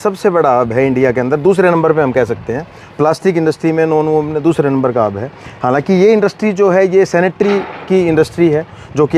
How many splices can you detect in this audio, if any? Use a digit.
0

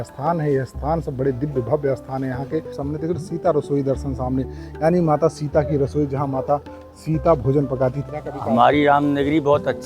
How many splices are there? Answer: 2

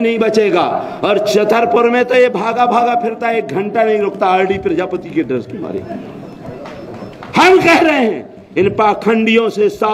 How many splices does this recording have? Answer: 0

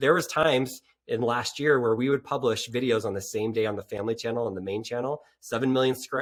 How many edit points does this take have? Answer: 0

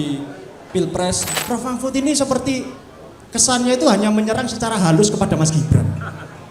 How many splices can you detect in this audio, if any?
1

